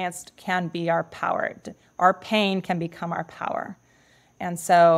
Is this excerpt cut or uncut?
uncut